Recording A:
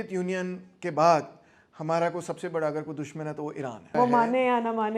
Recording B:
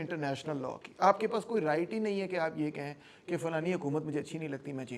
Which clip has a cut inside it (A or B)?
A